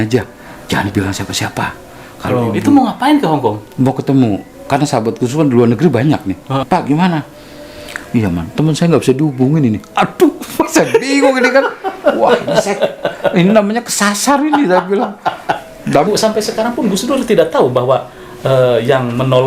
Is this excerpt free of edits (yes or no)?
no